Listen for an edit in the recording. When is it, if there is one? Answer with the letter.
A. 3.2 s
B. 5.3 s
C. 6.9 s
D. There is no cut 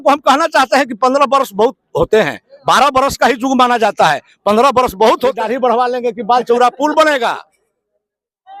B